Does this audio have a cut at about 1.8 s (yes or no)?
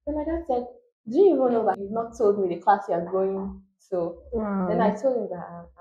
yes